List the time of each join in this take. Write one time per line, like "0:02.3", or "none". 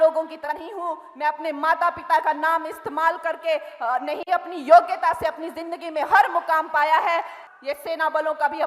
0:07.4